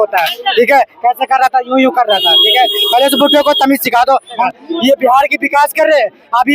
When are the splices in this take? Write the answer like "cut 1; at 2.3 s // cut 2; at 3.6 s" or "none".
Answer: cut 1; at 4.5 s